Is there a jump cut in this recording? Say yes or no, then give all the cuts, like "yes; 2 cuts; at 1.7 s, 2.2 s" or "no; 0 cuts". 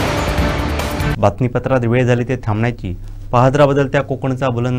no; 0 cuts